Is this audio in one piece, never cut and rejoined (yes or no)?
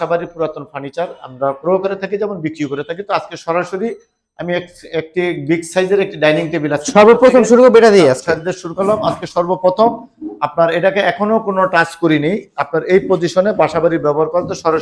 yes